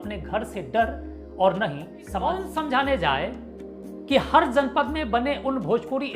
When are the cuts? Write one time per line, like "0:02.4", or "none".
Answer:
0:02.5